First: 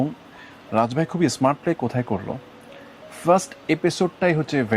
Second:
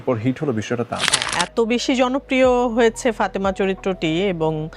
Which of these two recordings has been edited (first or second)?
second